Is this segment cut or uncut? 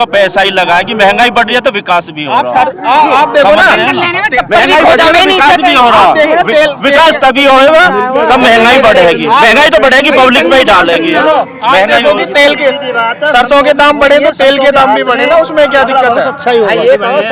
uncut